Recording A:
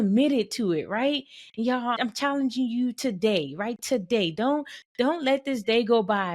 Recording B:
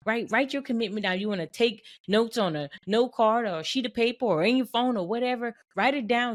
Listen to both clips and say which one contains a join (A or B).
A